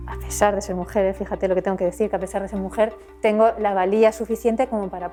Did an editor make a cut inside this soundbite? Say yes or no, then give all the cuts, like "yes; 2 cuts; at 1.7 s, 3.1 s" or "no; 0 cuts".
no; 0 cuts